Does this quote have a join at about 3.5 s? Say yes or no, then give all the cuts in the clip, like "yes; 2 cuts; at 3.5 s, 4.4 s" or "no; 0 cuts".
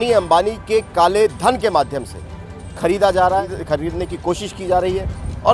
yes; 1 cut; at 3.5 s